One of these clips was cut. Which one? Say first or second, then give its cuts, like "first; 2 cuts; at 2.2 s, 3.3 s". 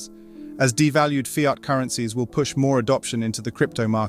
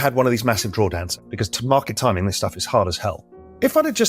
second; 1 cut; at 1.0 s